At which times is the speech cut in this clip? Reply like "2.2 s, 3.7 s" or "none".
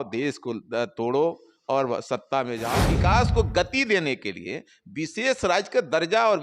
2.9 s